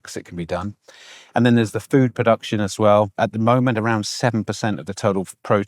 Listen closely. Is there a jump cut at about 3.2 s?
yes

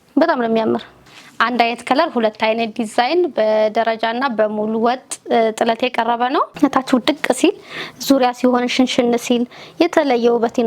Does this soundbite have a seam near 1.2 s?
yes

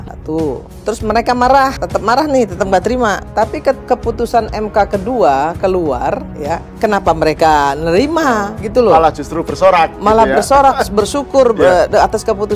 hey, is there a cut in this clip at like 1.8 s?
yes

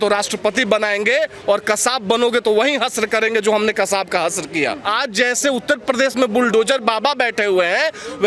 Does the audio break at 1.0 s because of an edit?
no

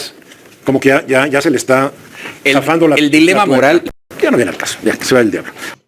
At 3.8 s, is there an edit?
yes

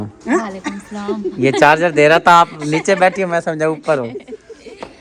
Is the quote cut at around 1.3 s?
no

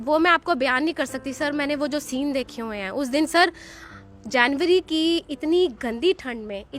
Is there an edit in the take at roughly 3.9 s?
no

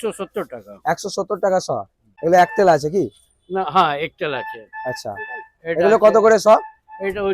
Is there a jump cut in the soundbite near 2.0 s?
yes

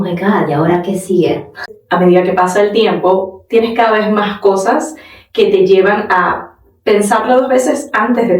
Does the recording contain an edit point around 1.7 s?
yes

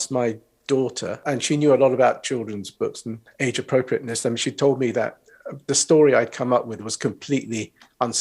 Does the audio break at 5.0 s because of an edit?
no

